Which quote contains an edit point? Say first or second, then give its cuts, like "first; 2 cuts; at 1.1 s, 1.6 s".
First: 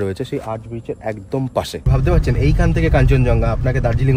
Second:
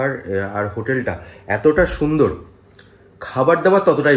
first; 1 cut; at 1.9 s